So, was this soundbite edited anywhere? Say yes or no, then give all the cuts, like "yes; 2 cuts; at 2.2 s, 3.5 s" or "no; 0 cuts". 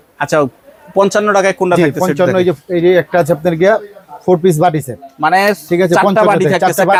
no; 0 cuts